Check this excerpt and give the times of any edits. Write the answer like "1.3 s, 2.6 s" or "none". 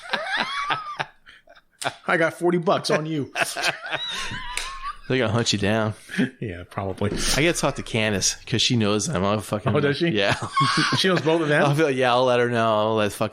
none